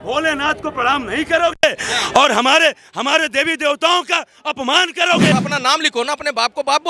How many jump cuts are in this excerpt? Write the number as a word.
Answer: one